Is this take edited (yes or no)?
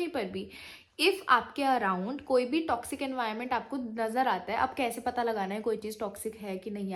no